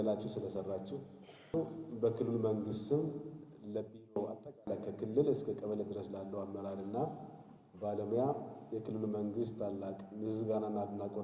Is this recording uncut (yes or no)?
no